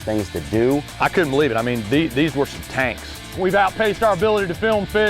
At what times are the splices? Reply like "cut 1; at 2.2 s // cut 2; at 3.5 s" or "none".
cut 1; at 0.9 s // cut 2; at 3.3 s